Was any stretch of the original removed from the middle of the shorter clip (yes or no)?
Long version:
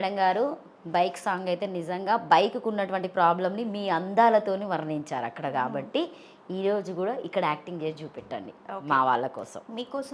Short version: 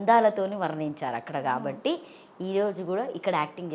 no